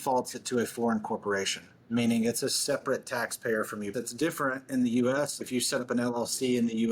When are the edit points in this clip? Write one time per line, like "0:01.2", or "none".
0:03.9
0:05.4